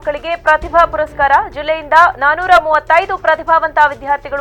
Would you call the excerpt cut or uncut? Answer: uncut